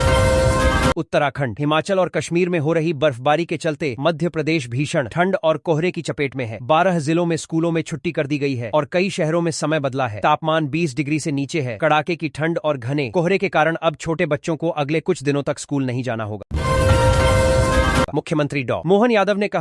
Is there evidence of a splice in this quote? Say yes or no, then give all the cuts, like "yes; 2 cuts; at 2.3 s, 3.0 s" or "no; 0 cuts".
yes; 3 cuts; at 0.9 s, 16.4 s, 18.1 s